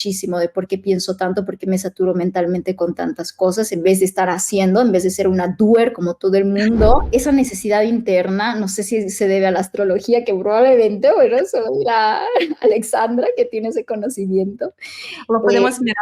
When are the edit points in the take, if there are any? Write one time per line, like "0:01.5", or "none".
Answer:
0:07.0

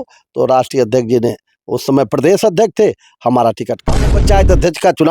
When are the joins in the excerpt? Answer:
0:04.1

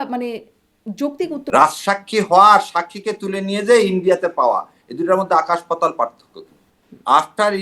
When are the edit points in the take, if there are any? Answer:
0:01.4
0:06.7

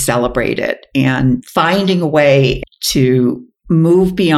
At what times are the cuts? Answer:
0:02.6

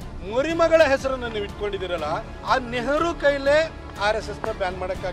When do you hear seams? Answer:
none

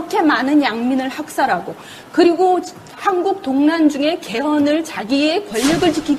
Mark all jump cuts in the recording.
0:02.8

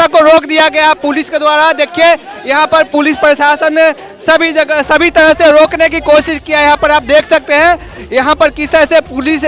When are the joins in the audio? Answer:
none

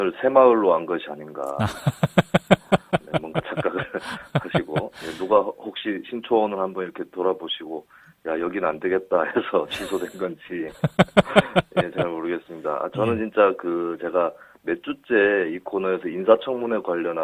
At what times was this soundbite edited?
none

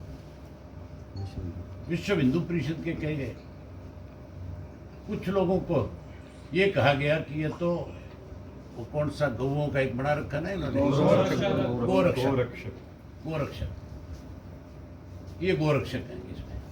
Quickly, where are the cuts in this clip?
none

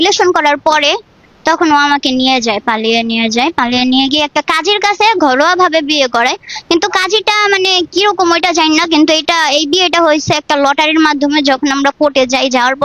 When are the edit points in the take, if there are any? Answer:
none

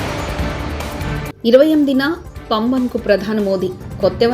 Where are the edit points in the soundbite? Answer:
0:01.3

